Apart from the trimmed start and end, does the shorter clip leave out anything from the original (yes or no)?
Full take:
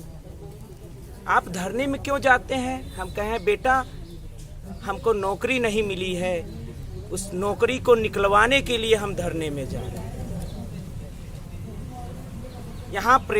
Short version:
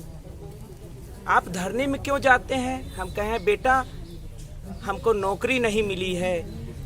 no